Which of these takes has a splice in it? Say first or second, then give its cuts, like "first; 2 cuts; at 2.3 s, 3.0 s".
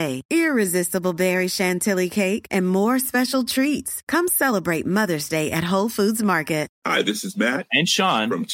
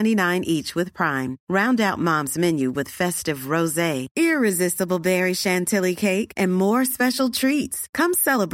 first; 1 cut; at 6.8 s